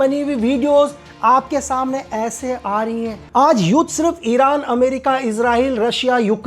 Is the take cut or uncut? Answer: cut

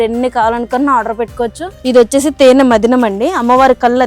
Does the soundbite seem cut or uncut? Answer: cut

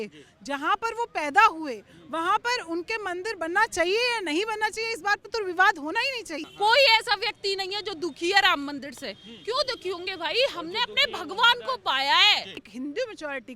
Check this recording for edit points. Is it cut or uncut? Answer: cut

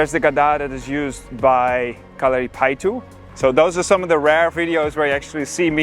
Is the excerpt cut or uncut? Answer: cut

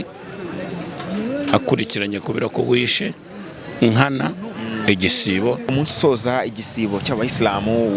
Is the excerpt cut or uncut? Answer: cut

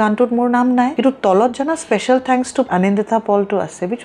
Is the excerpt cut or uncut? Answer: cut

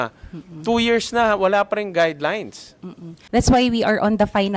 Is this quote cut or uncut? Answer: cut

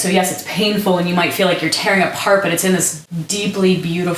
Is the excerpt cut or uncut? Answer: cut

